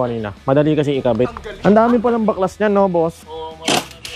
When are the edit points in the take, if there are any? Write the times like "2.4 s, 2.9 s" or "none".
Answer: 1.4 s, 3.3 s